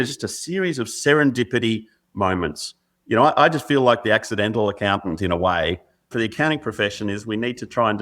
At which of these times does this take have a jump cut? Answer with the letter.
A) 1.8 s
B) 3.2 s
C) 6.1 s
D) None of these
C